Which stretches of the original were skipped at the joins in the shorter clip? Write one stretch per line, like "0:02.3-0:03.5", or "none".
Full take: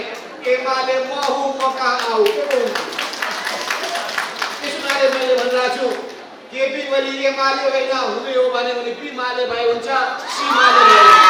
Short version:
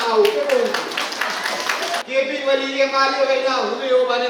0:04.0-0:06.5